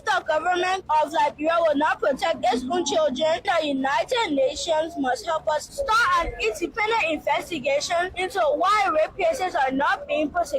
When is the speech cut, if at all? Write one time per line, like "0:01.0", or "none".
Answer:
0:03.4
0:08.1